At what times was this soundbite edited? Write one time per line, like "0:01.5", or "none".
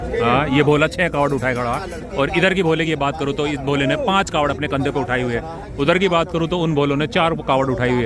none